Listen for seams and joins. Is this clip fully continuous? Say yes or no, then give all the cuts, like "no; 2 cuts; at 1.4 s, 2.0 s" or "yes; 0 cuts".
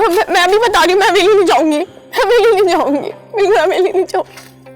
yes; 0 cuts